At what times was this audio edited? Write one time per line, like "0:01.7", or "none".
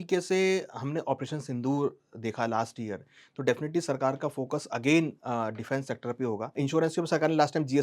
0:06.6